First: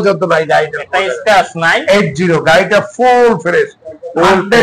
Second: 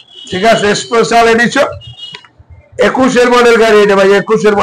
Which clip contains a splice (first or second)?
first